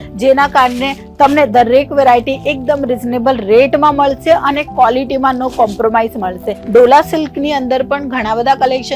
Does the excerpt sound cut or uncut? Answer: cut